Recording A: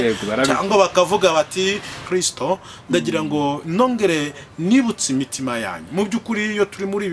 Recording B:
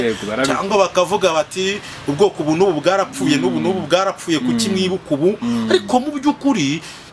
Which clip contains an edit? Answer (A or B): A